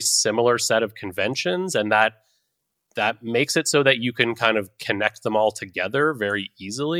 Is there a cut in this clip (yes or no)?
no